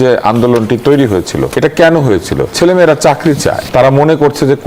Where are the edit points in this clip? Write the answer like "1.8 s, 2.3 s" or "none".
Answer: 1.5 s, 2.5 s, 3.6 s